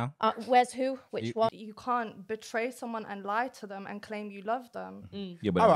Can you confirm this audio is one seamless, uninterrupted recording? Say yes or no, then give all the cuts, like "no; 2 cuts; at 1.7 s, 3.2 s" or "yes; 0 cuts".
no; 1 cut; at 1.5 s